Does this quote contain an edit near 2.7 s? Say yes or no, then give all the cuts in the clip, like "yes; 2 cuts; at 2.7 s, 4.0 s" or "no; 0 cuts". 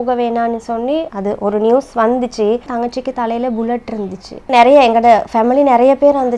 yes; 3 cuts; at 1.1 s, 2.7 s, 4.4 s